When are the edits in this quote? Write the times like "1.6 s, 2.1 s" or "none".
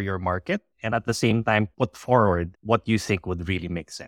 1.7 s, 2.5 s